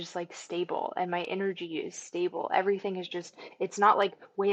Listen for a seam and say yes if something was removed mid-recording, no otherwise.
no